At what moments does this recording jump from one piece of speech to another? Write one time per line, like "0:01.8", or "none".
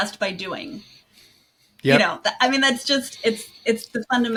none